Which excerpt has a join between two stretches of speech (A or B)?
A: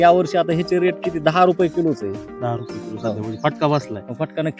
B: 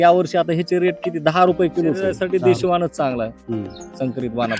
B